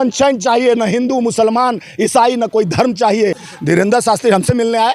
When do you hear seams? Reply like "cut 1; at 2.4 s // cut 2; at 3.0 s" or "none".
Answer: cut 1; at 3.4 s